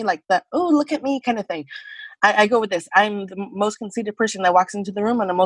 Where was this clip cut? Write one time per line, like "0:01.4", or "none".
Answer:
none